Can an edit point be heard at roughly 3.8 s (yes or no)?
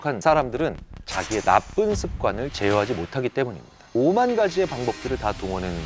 yes